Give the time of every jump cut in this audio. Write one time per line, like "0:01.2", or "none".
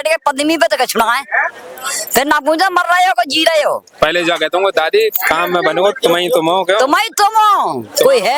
none